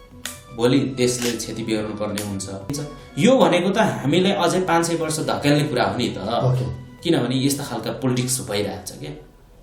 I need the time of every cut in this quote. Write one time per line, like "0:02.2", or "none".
0:02.8